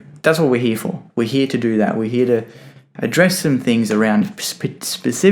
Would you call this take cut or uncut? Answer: uncut